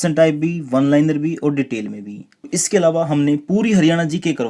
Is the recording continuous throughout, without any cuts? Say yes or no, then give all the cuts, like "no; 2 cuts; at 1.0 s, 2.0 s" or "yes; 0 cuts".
no; 1 cut; at 2.5 s